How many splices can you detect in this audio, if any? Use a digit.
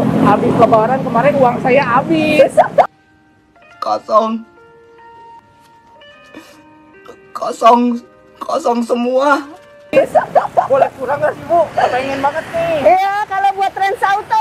0